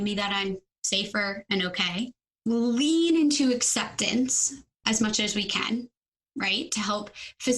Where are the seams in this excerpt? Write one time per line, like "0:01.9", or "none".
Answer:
0:02.2
0:04.7